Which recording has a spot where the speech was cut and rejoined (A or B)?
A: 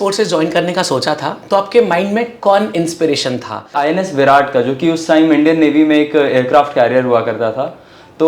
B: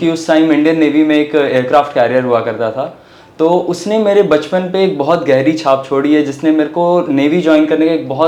A